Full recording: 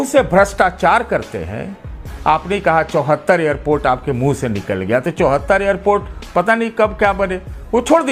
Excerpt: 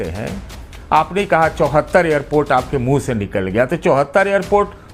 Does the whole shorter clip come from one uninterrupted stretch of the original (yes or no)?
yes